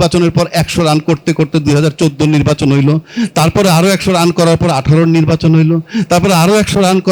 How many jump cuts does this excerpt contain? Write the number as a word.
zero